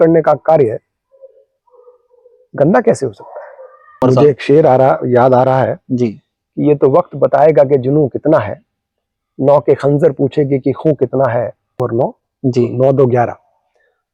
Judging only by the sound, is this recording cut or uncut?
cut